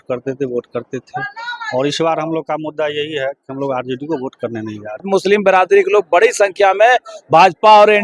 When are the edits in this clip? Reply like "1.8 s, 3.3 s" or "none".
5.0 s